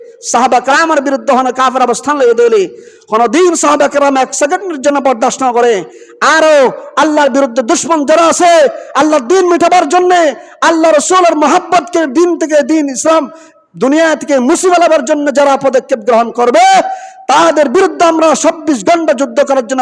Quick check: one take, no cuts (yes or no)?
yes